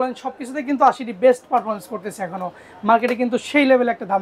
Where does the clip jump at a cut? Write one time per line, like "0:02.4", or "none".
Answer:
none